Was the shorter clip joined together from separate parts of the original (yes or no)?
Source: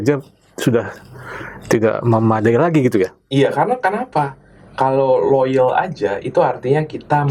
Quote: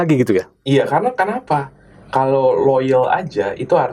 no